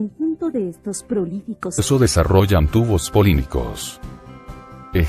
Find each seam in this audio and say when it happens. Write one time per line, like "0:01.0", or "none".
none